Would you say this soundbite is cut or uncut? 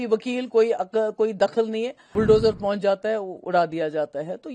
cut